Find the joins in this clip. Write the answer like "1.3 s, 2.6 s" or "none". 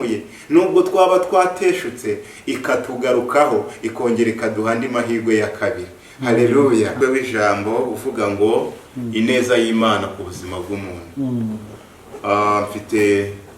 6.9 s

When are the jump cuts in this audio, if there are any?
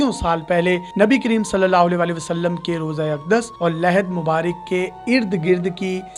none

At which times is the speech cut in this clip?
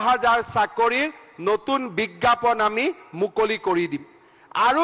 none

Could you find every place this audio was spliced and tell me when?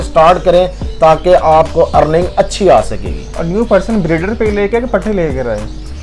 none

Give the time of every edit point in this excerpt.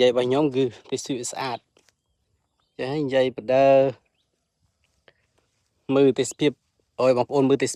none

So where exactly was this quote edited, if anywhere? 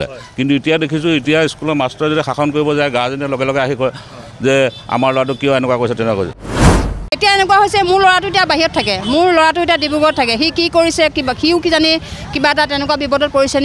6.8 s

